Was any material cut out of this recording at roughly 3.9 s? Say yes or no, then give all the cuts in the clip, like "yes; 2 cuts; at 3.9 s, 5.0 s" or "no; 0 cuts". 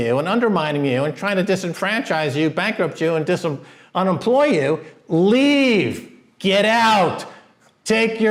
no; 0 cuts